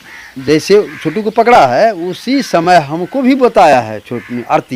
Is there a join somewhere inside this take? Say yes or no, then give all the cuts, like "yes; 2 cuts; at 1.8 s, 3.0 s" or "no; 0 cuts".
no; 0 cuts